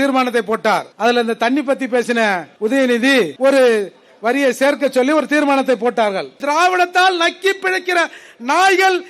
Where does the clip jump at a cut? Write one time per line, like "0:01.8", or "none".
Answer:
0:00.9
0:02.5
0:03.3
0:06.4